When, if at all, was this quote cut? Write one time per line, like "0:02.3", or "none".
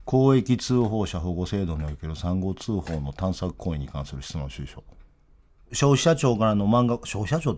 0:05.7